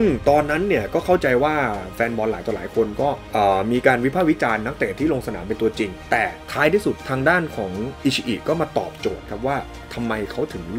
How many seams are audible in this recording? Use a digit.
1